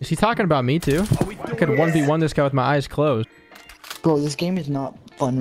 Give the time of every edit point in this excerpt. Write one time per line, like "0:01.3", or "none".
0:03.2